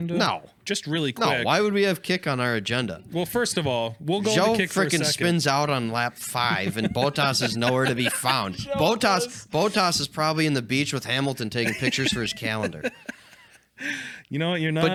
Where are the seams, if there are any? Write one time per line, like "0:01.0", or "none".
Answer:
none